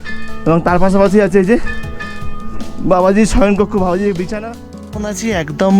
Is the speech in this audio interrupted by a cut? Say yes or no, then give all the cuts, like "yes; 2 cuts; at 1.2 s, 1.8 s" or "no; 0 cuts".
yes; 1 cut; at 4.3 s